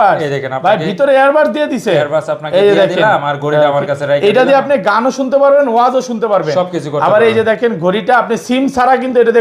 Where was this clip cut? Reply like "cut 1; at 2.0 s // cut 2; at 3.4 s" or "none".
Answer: none